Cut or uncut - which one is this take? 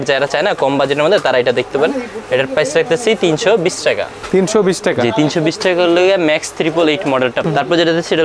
uncut